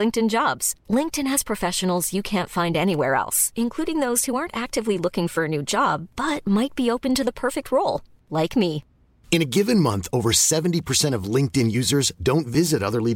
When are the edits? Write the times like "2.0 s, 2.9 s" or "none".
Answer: none